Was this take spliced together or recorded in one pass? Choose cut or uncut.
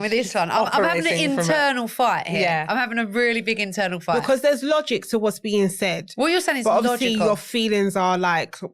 uncut